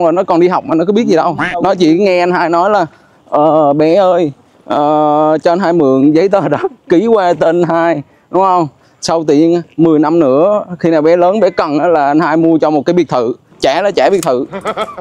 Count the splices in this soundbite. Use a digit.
1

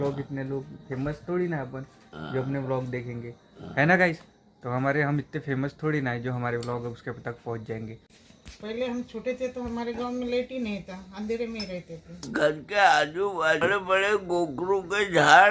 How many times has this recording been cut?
3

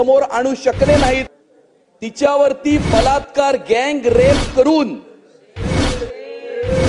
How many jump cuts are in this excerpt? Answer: 1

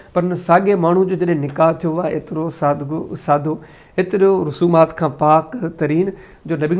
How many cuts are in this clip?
0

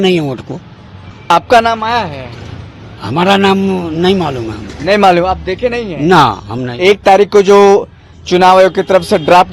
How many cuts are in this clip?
0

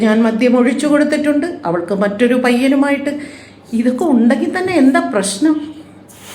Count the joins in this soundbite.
1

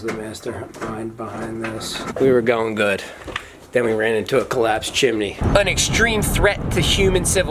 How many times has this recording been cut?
2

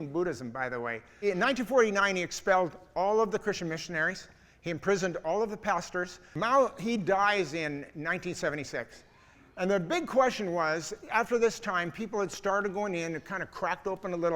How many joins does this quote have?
2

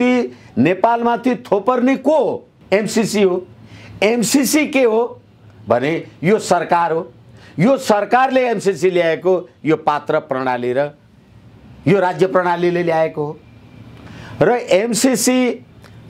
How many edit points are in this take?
1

